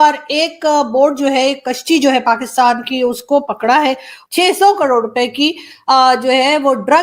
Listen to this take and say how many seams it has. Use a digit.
1